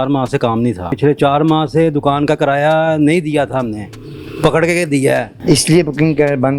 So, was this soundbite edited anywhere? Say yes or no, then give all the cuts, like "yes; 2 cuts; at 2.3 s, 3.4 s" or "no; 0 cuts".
yes; 2 cuts; at 0.9 s, 5.3 s